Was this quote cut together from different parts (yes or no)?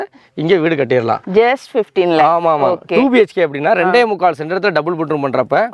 no